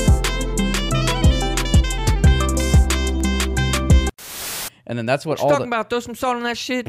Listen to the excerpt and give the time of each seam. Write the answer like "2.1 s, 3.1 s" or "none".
4.6 s